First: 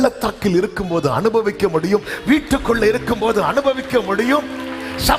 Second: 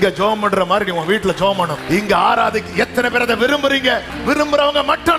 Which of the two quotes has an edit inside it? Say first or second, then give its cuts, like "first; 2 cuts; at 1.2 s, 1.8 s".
second; 2 cuts; at 1.8 s, 4.1 s